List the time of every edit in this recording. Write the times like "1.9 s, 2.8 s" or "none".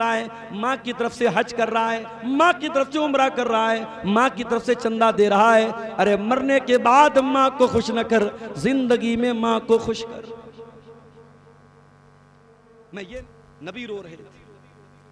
13.2 s